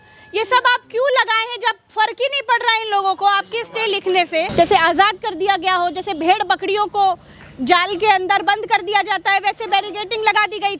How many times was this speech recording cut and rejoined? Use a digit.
1